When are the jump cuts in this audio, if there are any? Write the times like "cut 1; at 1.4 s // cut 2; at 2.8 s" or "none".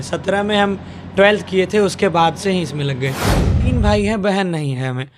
cut 1; at 3.6 s